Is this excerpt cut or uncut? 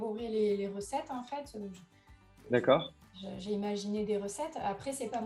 uncut